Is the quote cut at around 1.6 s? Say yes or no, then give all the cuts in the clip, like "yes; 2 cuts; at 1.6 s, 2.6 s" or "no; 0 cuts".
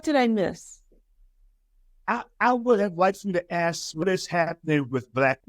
no; 1 cut; at 4.0 s